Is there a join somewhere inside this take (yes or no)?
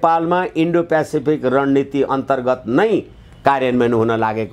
no